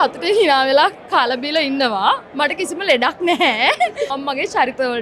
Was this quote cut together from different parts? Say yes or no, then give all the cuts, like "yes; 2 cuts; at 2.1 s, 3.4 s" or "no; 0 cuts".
yes; 1 cut; at 4.1 s